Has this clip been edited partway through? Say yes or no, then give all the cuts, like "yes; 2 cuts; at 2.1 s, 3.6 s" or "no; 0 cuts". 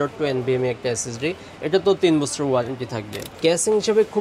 yes; 1 cut; at 3.2 s